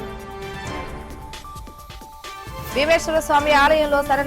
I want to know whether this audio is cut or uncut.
cut